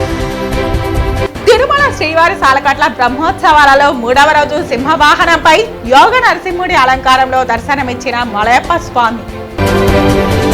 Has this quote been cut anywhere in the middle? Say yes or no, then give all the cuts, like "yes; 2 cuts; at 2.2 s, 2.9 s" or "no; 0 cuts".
no; 0 cuts